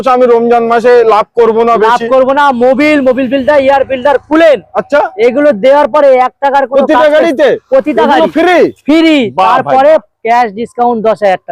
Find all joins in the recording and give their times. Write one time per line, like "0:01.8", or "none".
none